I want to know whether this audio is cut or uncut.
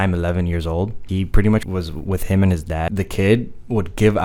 cut